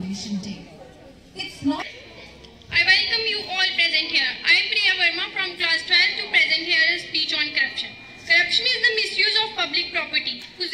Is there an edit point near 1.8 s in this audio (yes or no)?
yes